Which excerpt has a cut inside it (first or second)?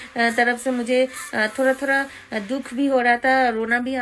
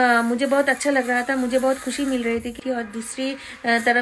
second